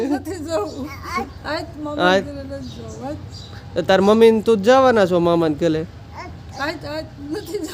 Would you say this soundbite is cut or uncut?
uncut